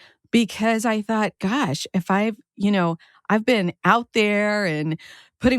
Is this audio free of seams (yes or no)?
yes